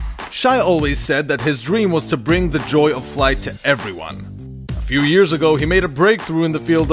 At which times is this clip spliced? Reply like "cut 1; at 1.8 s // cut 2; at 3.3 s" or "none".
none